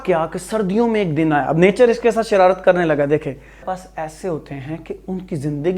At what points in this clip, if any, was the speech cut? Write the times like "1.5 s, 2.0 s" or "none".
3.7 s